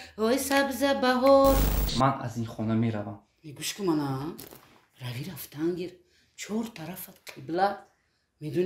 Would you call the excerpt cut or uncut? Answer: cut